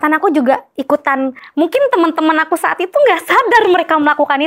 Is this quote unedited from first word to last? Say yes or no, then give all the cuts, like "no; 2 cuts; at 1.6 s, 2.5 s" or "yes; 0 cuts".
no; 1 cut; at 1.4 s